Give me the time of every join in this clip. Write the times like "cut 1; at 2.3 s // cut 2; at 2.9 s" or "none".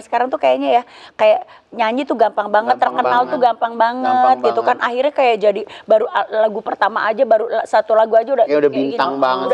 none